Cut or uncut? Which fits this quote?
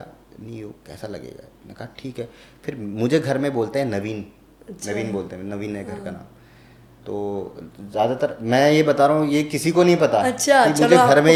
uncut